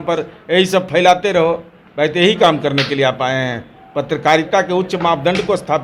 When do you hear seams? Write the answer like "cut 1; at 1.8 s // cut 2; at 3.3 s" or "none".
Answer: none